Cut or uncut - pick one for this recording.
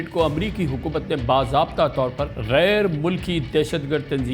cut